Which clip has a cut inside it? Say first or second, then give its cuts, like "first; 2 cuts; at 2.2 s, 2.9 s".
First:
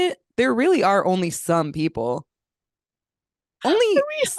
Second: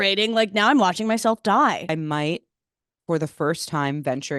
second; 1 cut; at 1.9 s